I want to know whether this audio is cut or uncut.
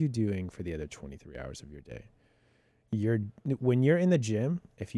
uncut